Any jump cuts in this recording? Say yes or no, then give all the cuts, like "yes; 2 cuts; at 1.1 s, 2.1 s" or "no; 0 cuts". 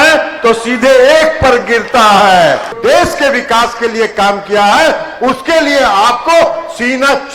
yes; 1 cut; at 2.8 s